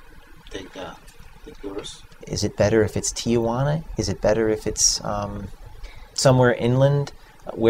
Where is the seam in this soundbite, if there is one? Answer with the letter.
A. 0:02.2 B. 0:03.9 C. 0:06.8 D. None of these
A